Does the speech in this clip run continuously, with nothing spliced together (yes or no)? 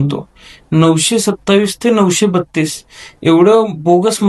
yes